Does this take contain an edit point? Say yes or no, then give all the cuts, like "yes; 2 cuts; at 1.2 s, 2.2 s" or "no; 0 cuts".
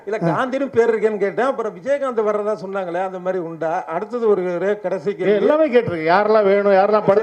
no; 0 cuts